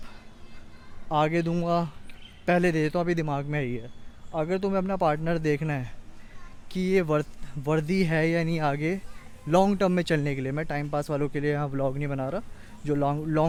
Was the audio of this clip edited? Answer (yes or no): no